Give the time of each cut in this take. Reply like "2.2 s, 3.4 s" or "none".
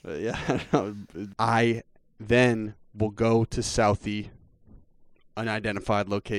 1.2 s